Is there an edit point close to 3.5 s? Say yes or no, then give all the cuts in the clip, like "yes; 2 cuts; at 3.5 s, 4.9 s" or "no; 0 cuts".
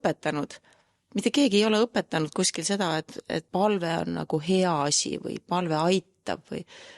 yes; 1 cut; at 3.5 s